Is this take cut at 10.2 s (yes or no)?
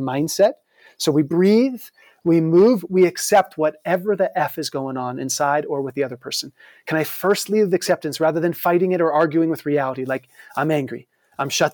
no